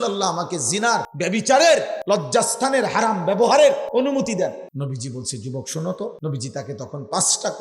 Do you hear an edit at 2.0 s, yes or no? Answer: yes